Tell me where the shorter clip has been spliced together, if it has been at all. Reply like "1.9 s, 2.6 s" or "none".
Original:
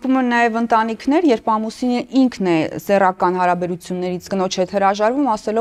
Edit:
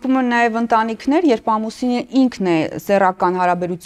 none